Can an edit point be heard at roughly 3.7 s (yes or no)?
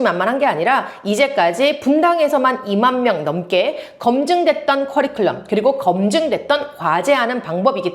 no